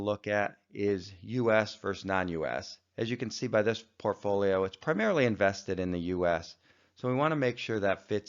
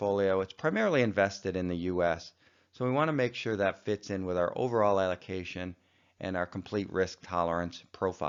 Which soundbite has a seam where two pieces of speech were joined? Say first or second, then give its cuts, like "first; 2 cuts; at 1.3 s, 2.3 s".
first; 1 cut; at 1.5 s